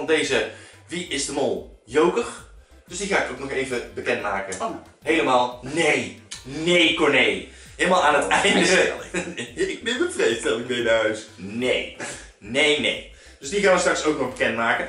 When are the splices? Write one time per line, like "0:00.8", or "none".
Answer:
none